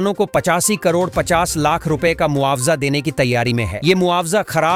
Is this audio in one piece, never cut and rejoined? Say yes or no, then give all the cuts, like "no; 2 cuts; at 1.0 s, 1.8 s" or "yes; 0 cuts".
yes; 0 cuts